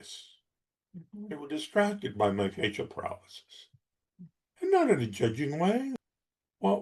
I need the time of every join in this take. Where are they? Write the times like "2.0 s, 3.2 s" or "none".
5.9 s